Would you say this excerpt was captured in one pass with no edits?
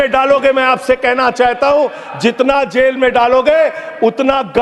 yes; 0 cuts

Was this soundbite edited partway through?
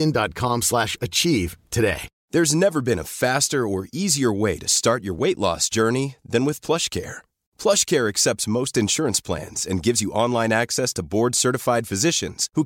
yes; 1 cut; at 2.1 s

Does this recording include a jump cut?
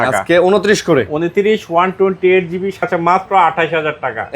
yes; 1 cut; at 2.8 s

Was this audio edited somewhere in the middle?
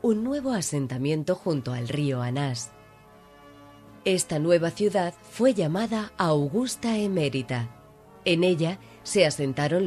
no; 0 cuts

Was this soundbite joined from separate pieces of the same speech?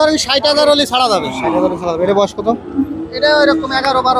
no; 0 cuts

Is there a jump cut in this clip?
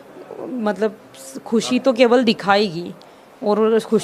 no; 0 cuts

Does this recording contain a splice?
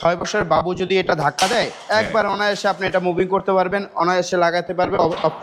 no; 0 cuts

